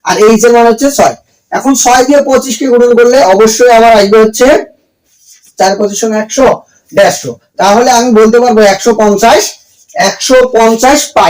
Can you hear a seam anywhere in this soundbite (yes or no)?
no